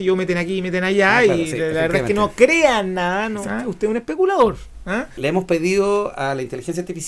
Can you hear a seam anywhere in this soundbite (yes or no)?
yes